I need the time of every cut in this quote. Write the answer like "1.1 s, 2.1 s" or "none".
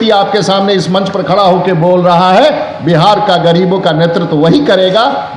none